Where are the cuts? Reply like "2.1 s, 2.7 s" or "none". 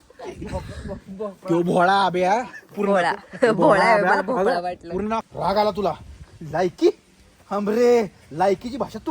5.3 s